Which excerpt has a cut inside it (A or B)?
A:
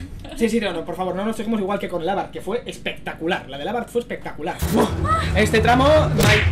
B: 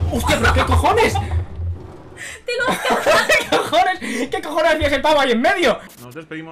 A